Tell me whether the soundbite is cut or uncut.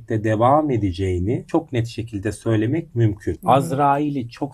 cut